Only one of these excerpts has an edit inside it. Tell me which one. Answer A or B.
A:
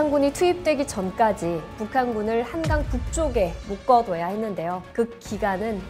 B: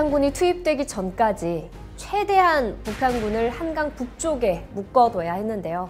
A